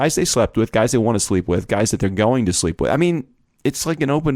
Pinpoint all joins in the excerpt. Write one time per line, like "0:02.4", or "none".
none